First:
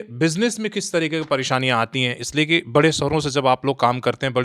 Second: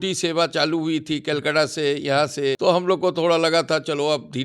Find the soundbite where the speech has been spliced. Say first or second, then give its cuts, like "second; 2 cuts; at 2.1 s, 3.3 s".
second; 1 cut; at 2.6 s